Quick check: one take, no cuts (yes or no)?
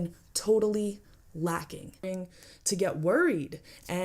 no